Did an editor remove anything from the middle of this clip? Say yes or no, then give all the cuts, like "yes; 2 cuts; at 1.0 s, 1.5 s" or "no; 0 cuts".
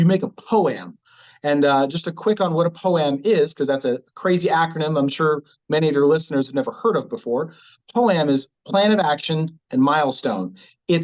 no; 0 cuts